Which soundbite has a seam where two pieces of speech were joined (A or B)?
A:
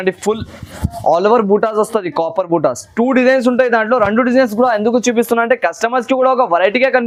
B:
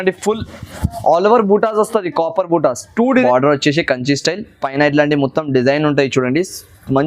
B